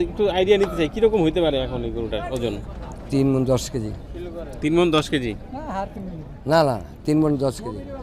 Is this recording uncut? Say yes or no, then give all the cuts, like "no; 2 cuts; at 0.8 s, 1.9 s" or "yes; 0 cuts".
yes; 0 cuts